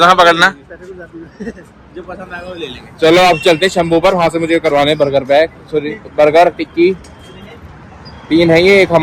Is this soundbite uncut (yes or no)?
yes